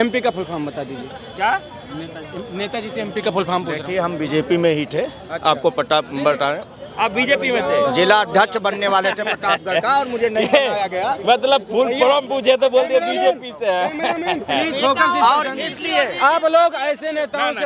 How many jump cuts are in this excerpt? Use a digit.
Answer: 0